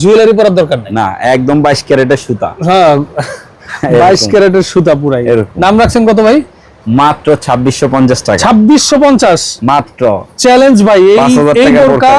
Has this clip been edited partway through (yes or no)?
no